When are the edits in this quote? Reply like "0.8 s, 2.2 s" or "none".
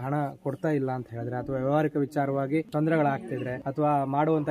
2.7 s, 3.6 s